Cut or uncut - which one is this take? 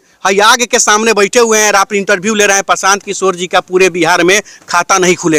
uncut